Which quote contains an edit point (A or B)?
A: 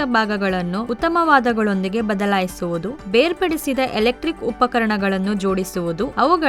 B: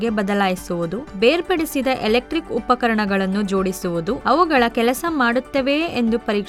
A